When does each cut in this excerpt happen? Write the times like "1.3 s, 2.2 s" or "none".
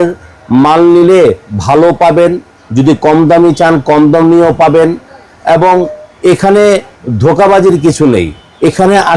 none